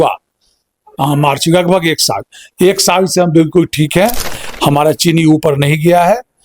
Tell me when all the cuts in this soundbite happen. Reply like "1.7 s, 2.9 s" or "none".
none

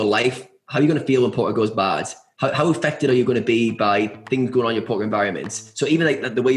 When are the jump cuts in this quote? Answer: none

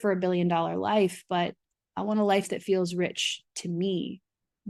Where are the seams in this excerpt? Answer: none

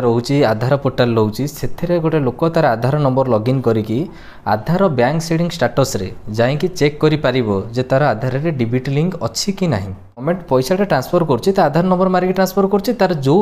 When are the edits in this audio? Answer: 10.2 s

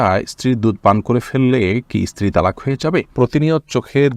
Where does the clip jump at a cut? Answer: 3.1 s

